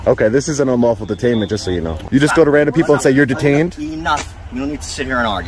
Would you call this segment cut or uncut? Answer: cut